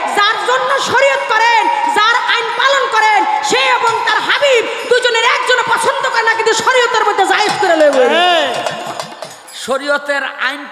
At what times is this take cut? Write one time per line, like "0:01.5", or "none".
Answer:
0:09.6